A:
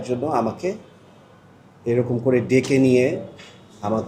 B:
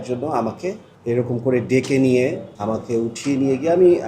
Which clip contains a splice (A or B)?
B